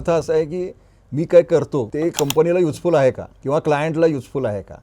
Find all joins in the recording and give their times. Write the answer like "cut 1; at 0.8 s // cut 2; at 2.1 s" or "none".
cut 1; at 1.9 s // cut 2; at 3.3 s